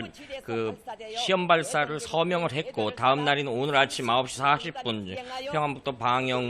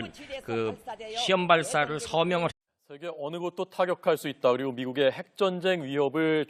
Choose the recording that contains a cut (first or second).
first